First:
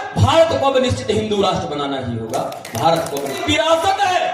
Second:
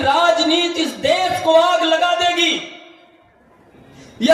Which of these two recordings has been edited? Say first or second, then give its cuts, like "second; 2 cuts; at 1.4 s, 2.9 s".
first; 1 cut; at 3.4 s